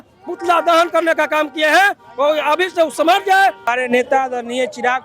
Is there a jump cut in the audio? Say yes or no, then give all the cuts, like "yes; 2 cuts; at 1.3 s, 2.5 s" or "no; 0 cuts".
yes; 1 cut; at 3.7 s